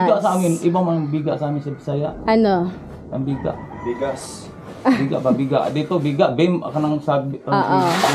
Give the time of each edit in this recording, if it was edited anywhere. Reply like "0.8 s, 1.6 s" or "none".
none